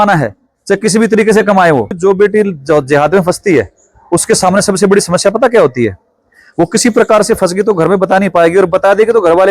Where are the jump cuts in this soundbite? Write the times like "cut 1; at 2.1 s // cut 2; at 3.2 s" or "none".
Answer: cut 1; at 1.9 s